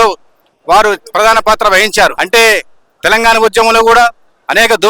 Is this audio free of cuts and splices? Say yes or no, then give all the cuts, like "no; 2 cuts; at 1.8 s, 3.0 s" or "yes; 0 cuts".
no; 1 cut; at 2.2 s